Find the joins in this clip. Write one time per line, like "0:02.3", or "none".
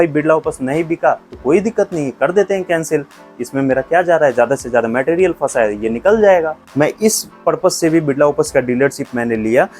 0:06.7